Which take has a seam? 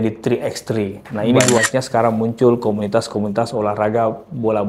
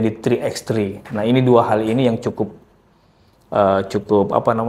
first; 1 cut; at 1.5 s

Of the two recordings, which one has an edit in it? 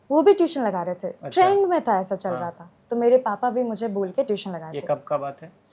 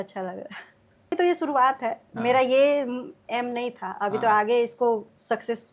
second; 1 cut; at 1.1 s

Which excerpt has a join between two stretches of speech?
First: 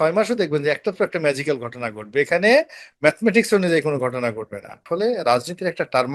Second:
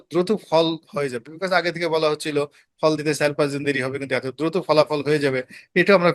first; 1 cut; at 4.8 s

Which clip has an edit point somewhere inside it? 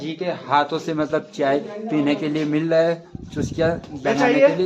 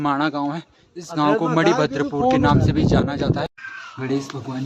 second; 1 cut; at 3.5 s

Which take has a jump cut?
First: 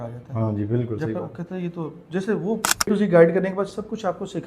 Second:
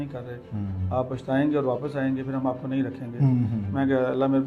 first; 1 cut; at 2.9 s

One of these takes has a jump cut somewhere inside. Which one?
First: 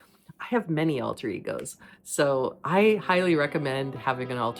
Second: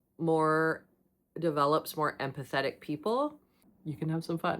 second; 1 cut; at 3.7 s

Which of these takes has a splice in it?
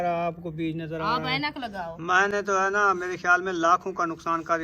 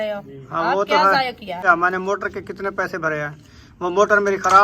second; 1 cut; at 1.6 s

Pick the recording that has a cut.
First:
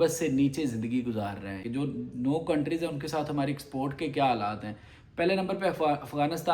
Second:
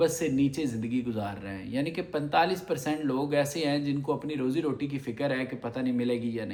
first; 1 cut; at 1.6 s

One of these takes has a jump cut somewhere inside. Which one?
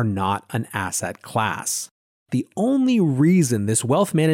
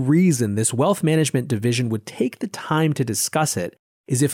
first; 1 cut; at 2.2 s

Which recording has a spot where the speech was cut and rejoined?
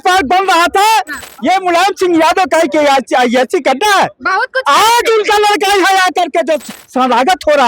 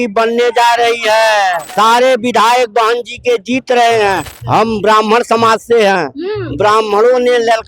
second; 2 cuts; at 1.6 s, 4.3 s

